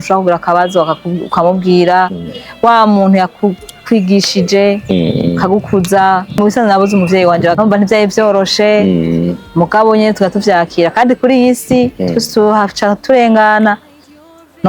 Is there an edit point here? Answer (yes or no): yes